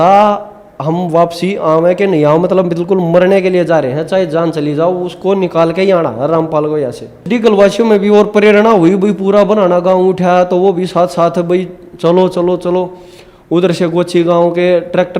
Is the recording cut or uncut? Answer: cut